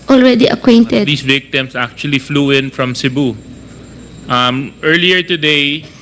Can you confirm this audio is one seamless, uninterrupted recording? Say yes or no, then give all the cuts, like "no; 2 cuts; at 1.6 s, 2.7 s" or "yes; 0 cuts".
no; 1 cut; at 1.1 s